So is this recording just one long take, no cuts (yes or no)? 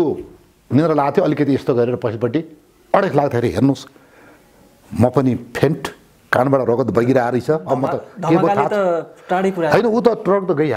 yes